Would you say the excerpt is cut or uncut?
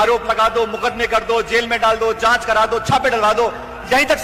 uncut